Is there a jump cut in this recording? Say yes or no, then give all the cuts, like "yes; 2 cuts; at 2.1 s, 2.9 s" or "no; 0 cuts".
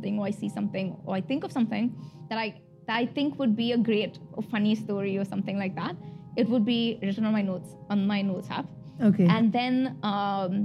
no; 0 cuts